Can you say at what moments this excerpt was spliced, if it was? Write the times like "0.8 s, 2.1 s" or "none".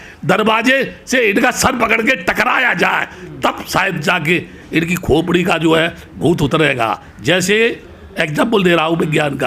none